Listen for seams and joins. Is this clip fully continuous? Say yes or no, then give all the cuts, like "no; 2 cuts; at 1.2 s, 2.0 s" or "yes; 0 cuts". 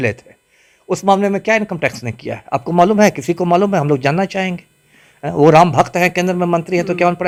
yes; 0 cuts